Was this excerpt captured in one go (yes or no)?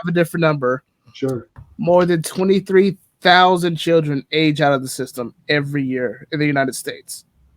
no